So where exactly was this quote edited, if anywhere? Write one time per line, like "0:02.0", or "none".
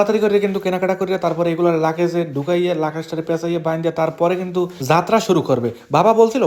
none